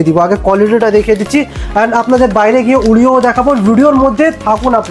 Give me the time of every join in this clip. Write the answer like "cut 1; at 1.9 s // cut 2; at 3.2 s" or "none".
none